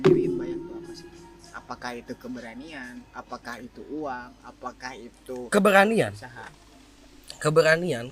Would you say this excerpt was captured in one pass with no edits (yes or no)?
yes